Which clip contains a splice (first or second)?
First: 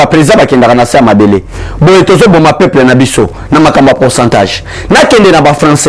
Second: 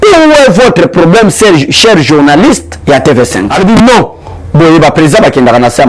second